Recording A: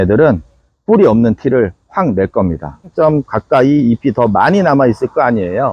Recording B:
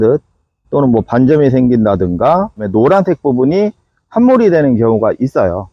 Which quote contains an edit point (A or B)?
A